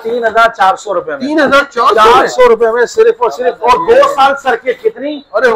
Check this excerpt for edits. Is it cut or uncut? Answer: uncut